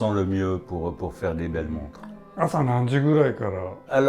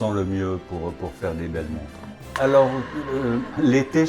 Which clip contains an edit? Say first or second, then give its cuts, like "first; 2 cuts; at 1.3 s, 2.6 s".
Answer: second; 1 cut; at 2.2 s